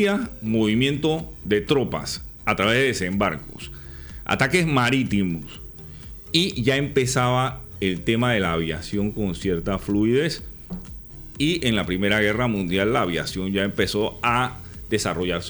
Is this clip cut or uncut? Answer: uncut